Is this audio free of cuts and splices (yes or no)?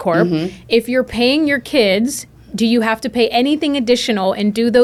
yes